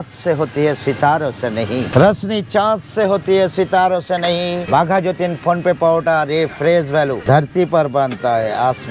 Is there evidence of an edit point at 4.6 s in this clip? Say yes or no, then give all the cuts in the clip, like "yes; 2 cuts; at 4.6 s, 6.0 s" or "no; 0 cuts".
yes; 3 cuts; at 1.9 s, 4.6 s, 7.2 s